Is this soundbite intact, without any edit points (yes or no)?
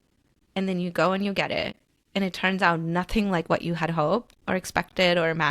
no